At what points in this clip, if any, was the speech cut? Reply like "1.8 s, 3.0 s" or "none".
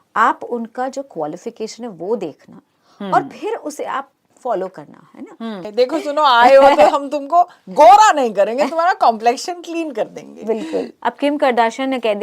5.6 s, 10.9 s